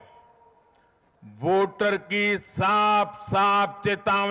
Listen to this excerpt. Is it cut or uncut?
uncut